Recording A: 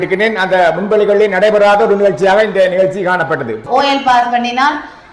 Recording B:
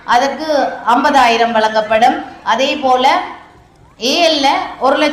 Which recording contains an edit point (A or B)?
A